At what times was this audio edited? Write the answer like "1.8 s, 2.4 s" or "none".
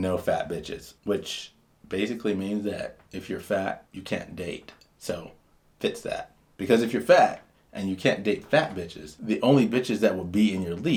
none

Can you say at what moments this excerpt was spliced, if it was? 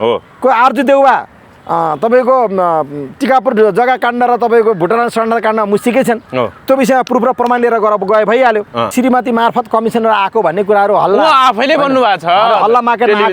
8.9 s

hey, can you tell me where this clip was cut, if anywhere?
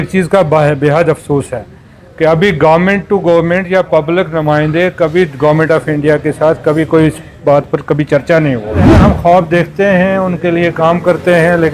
9.0 s

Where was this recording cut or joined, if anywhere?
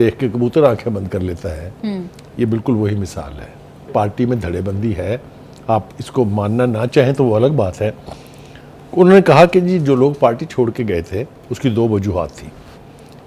3.9 s

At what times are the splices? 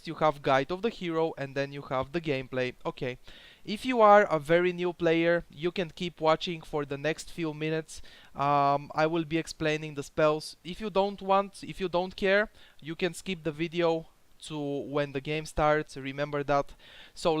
7.8 s

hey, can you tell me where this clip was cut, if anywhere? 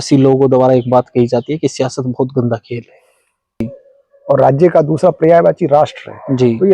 3.6 s

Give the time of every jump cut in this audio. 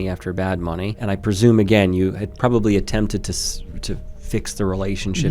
1.0 s

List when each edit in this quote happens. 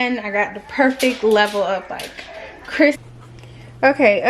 3.0 s

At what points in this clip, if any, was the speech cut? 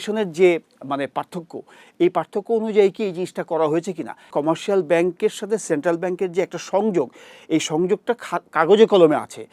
4.3 s

